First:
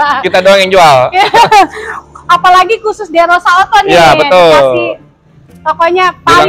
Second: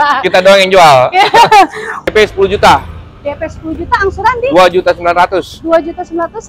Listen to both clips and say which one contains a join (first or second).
second